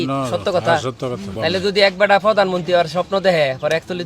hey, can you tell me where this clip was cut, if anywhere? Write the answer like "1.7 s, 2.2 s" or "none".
1.3 s